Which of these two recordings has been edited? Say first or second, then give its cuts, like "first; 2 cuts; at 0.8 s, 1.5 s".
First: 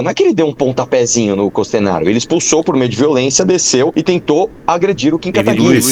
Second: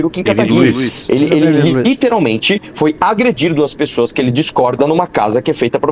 first; 1 cut; at 3.9 s